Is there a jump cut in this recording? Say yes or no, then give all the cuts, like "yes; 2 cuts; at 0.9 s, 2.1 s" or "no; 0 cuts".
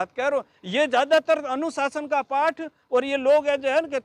no; 0 cuts